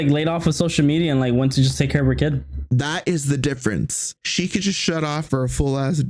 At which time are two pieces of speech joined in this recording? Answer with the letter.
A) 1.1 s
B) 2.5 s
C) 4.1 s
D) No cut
C